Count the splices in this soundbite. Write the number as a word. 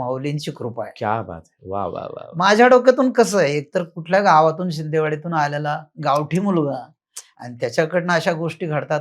zero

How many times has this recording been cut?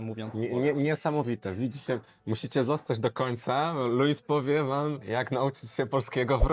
zero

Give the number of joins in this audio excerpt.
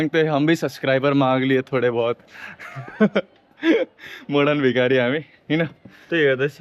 zero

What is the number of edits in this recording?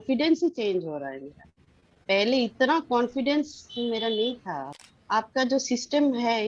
one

